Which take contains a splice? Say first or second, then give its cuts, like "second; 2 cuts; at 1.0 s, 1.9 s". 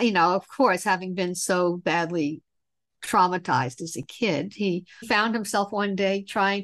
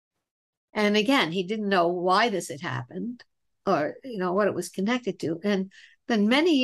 first; 1 cut; at 5.0 s